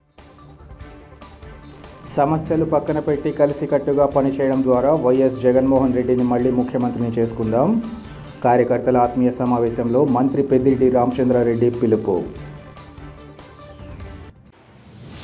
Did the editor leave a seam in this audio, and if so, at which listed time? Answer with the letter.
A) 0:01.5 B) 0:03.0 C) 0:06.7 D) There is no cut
A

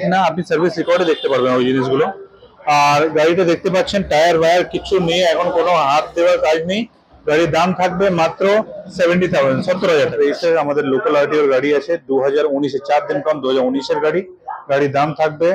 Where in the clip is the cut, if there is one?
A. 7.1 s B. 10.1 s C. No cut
B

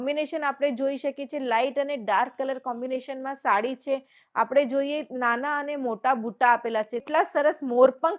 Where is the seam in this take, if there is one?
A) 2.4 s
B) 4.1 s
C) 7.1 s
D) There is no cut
C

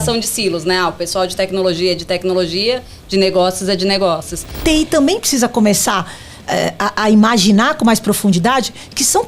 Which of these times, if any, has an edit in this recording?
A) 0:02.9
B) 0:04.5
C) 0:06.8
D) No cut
B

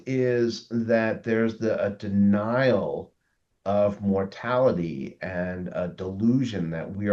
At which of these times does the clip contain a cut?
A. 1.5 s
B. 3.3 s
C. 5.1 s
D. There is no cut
D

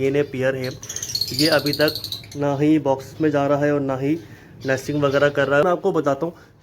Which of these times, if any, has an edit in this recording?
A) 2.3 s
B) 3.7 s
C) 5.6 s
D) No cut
C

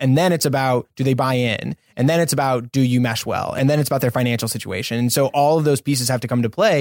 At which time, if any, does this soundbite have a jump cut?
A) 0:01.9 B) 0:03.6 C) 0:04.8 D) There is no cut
B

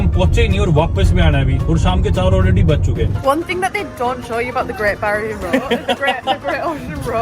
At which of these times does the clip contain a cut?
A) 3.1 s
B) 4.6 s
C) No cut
A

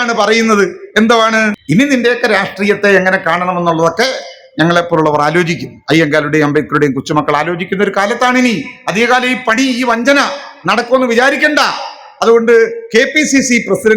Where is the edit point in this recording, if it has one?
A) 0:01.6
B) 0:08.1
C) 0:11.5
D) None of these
A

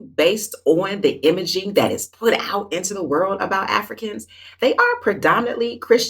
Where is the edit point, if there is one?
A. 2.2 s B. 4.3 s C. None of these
C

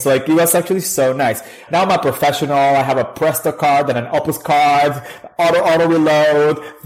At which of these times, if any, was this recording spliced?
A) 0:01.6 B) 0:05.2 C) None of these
A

